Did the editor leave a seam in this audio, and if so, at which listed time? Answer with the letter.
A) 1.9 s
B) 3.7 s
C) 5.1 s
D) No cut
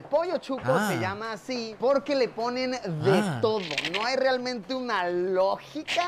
A